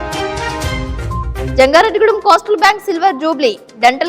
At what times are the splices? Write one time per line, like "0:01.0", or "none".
0:01.5